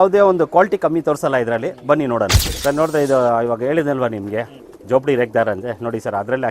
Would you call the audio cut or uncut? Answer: cut